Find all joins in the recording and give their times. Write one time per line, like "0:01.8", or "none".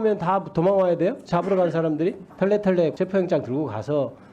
0:02.2
0:02.9